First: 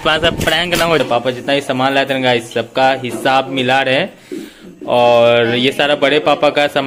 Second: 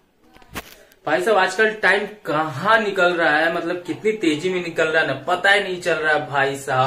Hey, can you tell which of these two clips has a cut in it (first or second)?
first